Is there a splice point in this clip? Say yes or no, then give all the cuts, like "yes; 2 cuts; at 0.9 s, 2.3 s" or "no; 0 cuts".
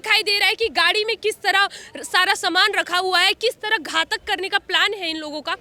no; 0 cuts